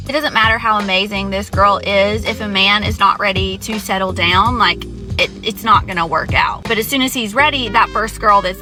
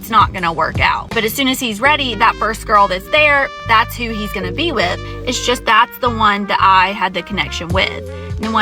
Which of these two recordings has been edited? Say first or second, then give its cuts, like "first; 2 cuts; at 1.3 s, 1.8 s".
second; 1 cut; at 5.0 s